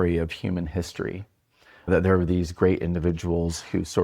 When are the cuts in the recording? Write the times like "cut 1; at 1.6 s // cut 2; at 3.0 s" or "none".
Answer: cut 1; at 1.9 s